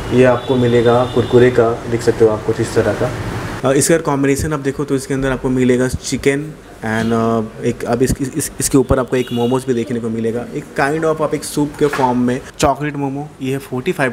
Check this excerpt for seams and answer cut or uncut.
cut